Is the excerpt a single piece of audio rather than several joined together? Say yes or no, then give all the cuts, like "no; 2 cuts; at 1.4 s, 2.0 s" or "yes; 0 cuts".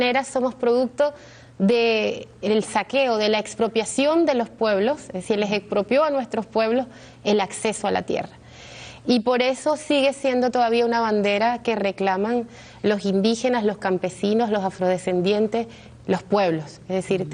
yes; 0 cuts